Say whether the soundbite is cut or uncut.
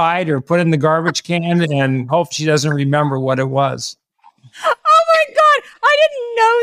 uncut